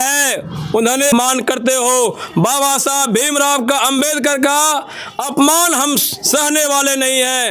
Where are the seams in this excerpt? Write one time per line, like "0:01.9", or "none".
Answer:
0:01.1